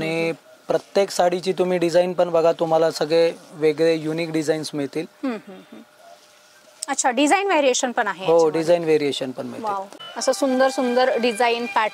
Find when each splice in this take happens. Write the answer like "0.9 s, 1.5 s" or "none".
none

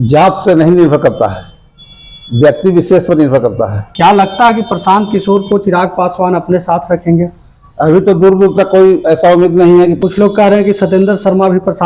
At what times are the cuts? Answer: 3.8 s, 10.0 s

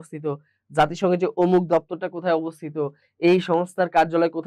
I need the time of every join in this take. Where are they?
none

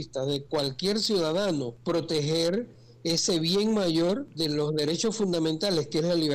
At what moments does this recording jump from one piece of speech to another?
1.7 s, 4.3 s

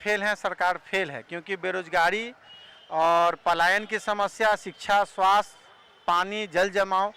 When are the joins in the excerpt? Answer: none

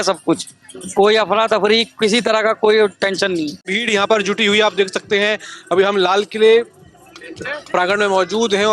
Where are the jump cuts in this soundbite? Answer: 3.8 s

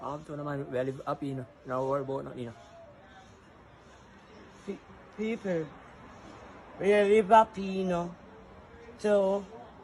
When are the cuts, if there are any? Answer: none

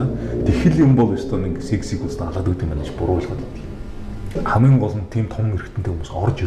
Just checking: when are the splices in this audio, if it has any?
4.4 s

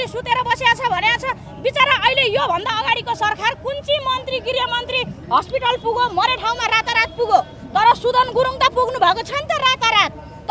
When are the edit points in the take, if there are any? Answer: none

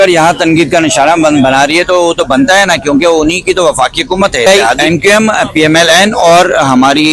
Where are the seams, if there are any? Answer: 4.5 s

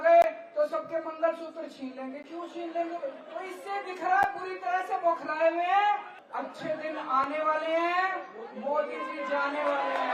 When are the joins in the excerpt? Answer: 3.2 s, 6.2 s

